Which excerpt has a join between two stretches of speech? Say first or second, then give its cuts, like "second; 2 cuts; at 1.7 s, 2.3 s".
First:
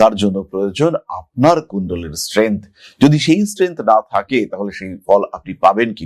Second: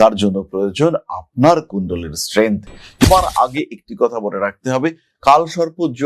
second; 1 cut; at 3.0 s